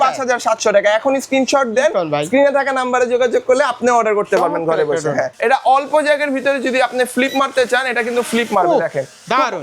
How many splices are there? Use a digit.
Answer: 1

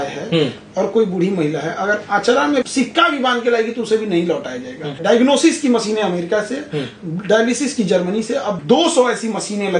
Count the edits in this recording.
3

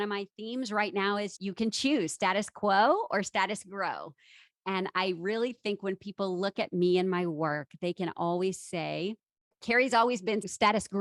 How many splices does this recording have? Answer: 1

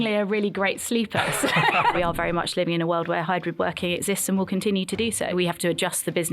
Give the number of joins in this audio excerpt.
2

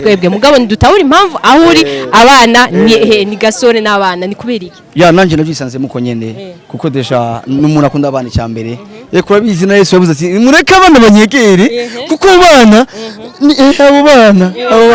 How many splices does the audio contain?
0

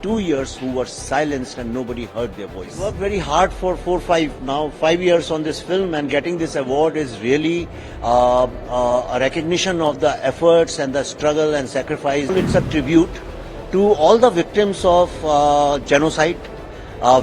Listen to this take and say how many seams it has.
2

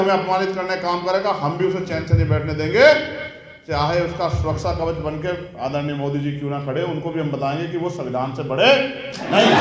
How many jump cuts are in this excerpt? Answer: 0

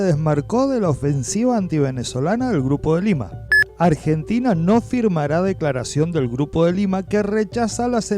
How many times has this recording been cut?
1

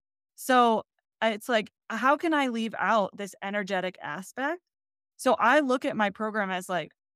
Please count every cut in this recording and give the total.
0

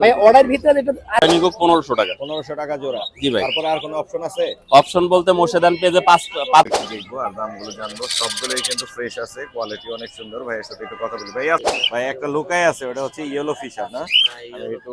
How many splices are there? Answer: 3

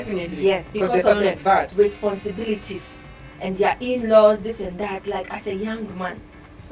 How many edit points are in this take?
0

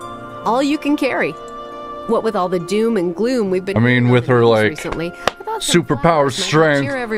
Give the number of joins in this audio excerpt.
1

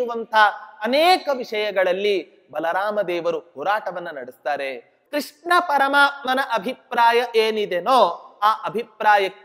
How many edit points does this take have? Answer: 1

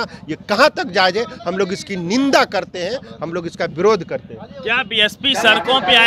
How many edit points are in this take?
0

